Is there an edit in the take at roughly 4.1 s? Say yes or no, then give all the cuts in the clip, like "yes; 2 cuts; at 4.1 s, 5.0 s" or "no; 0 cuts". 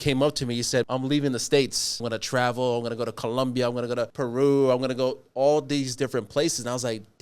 yes; 3 cuts; at 0.8 s, 2.0 s, 4.1 s